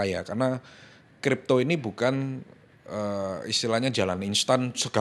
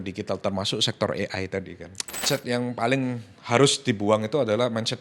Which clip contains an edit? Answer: second; 1 cut; at 2.2 s

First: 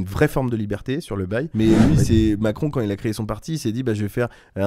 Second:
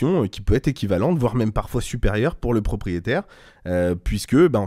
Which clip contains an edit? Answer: first; 1 cut; at 1.7 s

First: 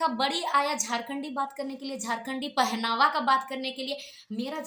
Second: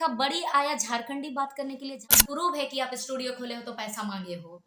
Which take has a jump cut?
second; 1 cut; at 2.1 s

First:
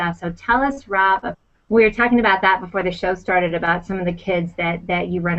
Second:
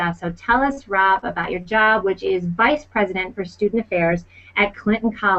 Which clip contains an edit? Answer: second; 1 cut; at 1.4 s

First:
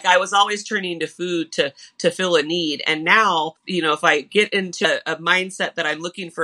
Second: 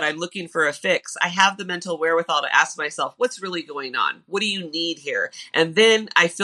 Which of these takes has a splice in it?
first; 2 cuts; at 3.6 s, 4.9 s

